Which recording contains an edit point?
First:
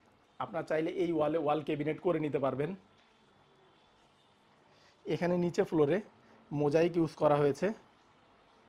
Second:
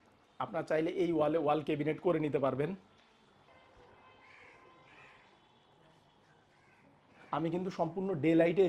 second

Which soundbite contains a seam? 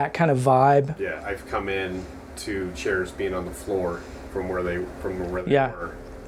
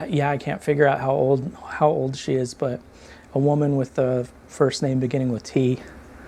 first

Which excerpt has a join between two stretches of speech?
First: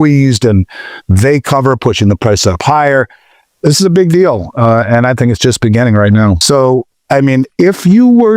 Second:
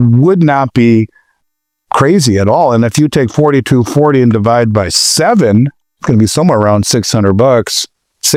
first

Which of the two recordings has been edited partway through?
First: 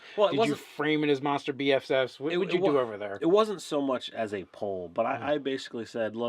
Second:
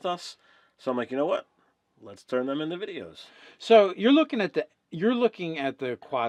first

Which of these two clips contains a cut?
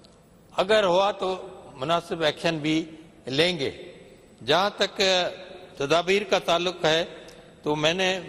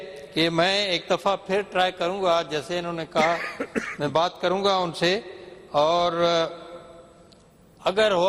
second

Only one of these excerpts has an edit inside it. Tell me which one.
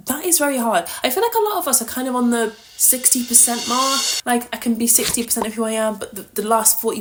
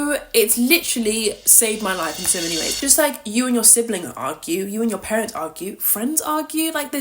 second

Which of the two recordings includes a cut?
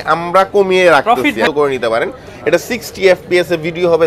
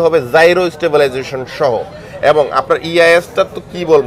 first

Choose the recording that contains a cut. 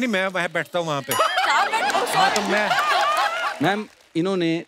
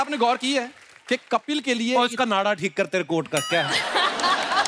first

